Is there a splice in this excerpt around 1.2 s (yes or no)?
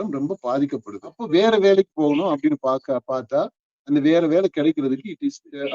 yes